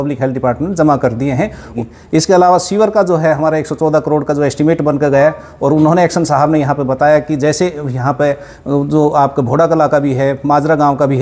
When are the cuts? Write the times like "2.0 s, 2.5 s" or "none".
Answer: 1.7 s